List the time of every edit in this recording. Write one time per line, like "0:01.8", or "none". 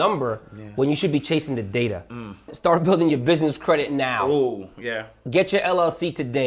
0:02.5